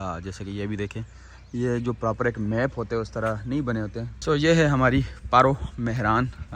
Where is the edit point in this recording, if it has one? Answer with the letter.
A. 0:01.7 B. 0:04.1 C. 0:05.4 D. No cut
B